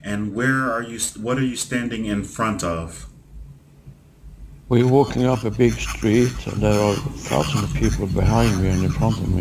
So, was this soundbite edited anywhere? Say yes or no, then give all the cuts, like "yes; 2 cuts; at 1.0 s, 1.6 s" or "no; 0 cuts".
yes; 1 cut; at 2.7 s